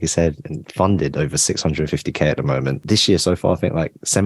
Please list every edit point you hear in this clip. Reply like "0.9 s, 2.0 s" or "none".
2.8 s